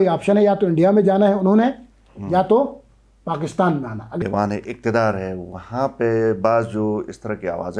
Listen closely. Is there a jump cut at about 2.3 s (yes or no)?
no